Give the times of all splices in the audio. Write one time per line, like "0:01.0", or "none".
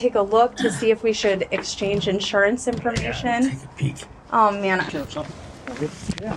0:04.9